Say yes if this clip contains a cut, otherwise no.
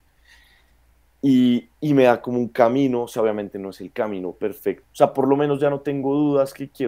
yes